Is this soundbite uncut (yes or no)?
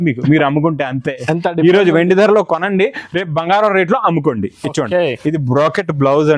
yes